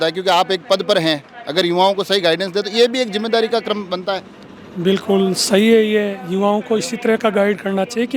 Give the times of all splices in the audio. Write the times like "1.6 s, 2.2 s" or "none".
none

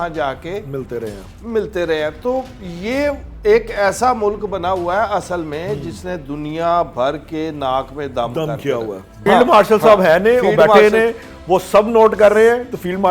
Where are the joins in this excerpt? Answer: 9.1 s

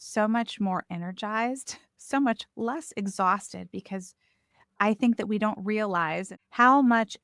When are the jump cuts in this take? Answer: 6.3 s

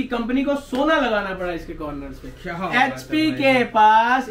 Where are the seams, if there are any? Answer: none

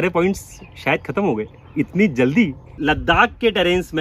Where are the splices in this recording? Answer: 2.7 s

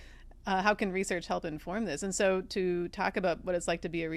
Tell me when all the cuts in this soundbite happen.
none

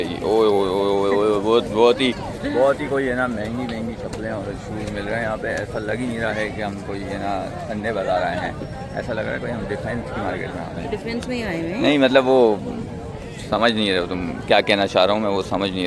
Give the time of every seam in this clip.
none

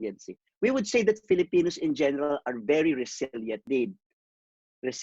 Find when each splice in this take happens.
3.6 s

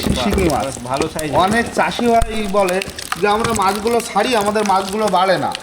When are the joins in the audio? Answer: none

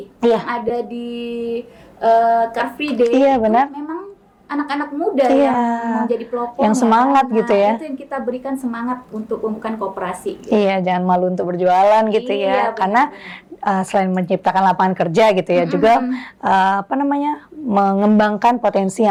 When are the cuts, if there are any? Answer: none

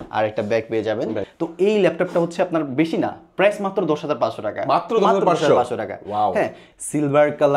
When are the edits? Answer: 1.3 s, 6.6 s

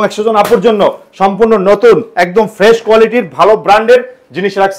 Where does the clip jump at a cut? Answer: none

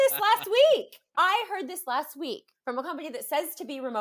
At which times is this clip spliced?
1.0 s, 2.5 s

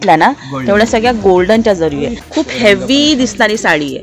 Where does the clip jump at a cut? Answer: 2.2 s

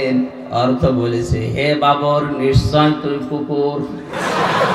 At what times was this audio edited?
none

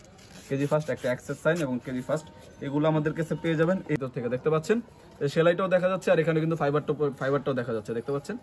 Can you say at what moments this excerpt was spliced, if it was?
4.0 s

